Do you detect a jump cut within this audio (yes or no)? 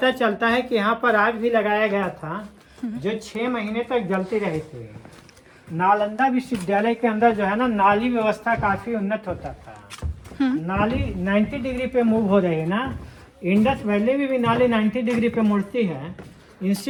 no